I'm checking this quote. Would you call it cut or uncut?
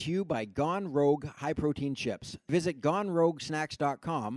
cut